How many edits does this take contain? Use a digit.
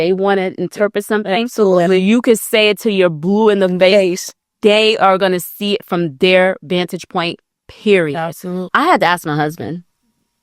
1